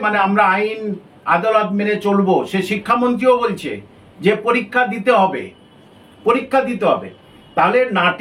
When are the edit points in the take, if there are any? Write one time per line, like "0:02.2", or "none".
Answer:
none

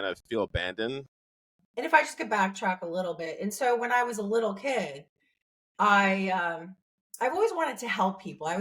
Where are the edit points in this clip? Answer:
0:01.5

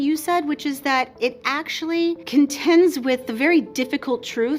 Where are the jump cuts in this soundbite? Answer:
0:02.2

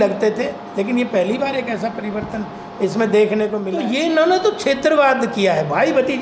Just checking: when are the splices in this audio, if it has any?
0:03.6

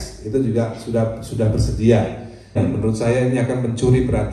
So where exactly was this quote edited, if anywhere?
0:02.6

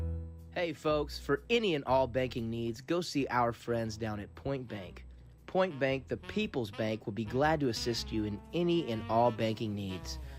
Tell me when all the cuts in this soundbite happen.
0:03.8

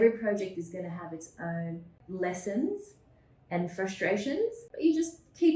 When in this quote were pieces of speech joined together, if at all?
0:01.9
0:04.6

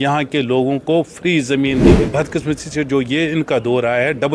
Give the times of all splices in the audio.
0:02.1

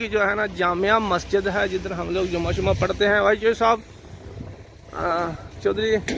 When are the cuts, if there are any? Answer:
none

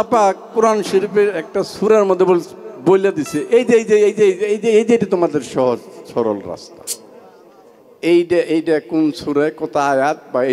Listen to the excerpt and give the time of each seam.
none

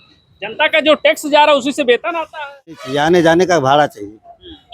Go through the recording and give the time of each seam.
0:02.8

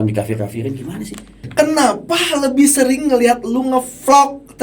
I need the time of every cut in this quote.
0:01.5

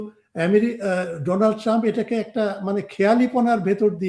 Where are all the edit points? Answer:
none

